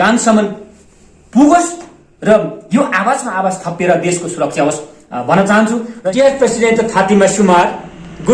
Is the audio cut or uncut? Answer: cut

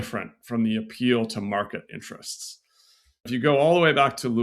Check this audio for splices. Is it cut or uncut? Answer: cut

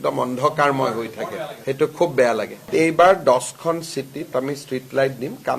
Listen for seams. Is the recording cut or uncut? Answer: cut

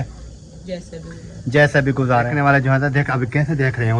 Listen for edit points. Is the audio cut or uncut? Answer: cut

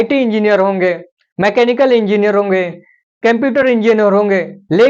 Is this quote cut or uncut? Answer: uncut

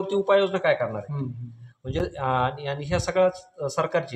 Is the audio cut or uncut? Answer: uncut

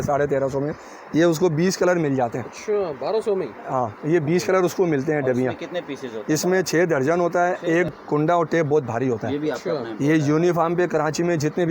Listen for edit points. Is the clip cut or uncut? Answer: cut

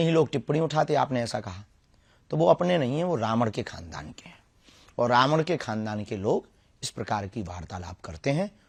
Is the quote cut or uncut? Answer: uncut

